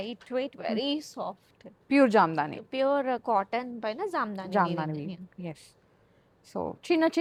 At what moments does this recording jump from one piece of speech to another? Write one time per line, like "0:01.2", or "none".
none